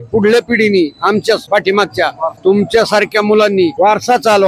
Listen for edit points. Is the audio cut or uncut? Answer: uncut